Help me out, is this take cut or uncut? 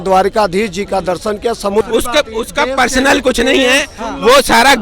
cut